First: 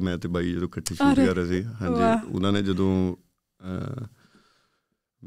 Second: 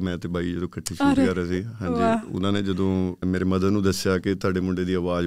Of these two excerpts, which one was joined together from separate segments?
second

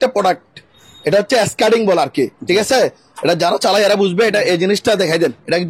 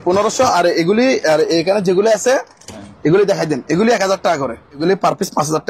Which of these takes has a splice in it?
second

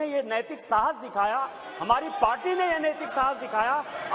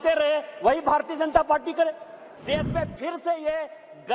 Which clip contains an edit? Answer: second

